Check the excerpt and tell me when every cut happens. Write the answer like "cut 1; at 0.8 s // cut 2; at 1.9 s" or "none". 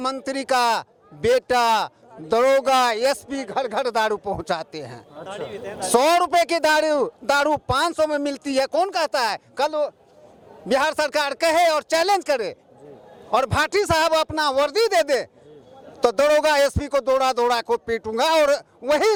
none